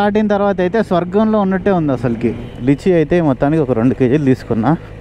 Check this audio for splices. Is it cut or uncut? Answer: cut